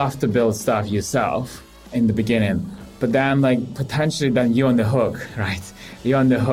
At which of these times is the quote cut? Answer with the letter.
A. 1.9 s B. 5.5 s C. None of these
A